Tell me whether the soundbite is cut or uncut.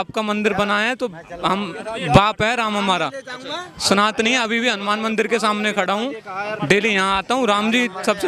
uncut